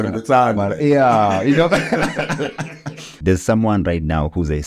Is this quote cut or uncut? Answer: cut